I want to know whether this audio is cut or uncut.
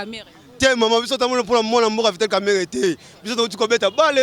uncut